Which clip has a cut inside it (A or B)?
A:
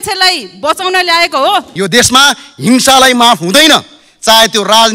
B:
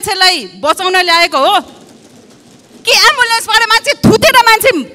A